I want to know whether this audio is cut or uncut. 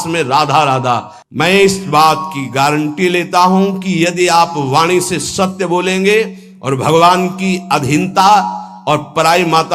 cut